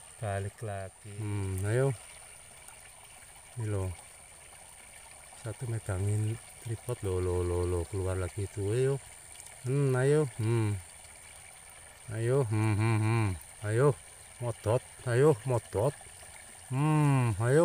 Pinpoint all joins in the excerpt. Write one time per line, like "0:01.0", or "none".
0:01.0

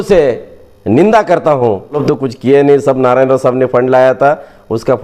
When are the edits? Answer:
0:02.0

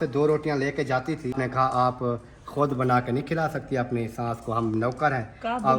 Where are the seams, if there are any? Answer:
0:01.3

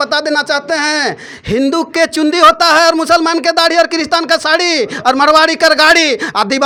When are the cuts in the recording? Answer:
none

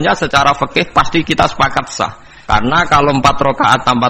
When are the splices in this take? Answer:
0:02.3

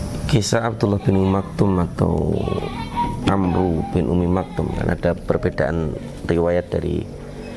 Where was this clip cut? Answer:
none

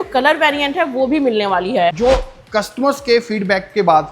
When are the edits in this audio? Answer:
0:02.0

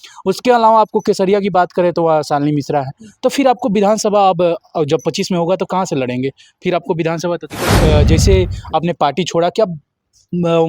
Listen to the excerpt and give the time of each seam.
0:07.8

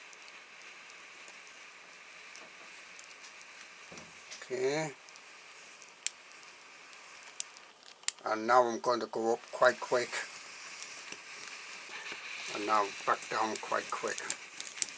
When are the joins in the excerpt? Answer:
0:12.0

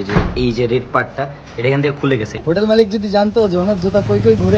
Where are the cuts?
0:02.3

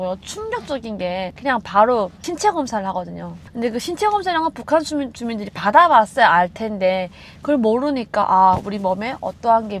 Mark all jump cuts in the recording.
0:01.3

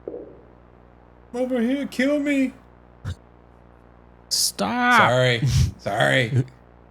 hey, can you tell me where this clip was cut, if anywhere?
0:03.6

